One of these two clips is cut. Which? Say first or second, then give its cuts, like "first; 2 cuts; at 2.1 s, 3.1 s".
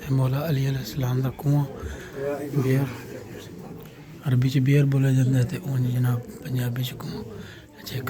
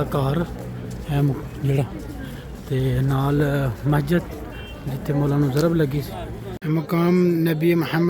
second; 1 cut; at 6.5 s